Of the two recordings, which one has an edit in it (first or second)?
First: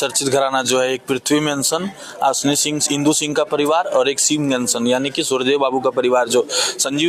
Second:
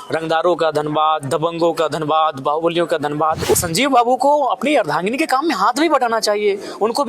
second